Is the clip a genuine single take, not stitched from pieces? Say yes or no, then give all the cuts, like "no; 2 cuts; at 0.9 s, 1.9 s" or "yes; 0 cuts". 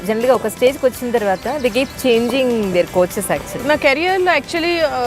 no; 1 cut; at 3.6 s